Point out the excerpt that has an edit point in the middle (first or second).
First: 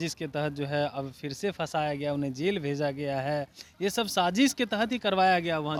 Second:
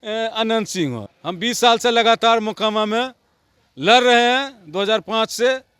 second